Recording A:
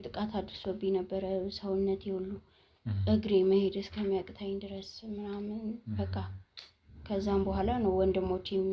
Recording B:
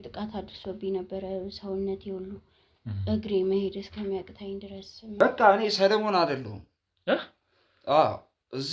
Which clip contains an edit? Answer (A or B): B